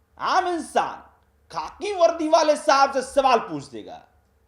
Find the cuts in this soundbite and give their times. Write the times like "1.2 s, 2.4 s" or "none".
none